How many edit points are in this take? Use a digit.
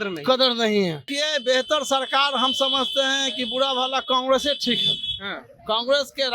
1